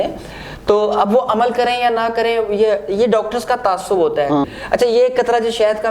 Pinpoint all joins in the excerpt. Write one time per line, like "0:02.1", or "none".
0:04.5